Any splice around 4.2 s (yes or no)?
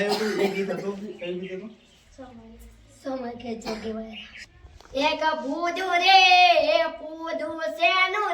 yes